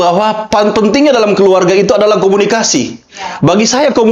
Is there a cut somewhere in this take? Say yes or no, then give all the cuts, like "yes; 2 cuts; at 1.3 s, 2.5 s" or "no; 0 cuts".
no; 0 cuts